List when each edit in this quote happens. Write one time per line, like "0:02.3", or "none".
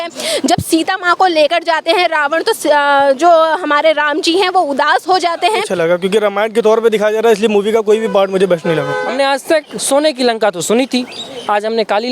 0:05.7
0:09.1